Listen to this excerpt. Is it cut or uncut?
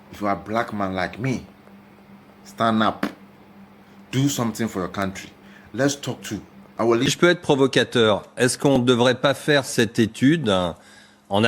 cut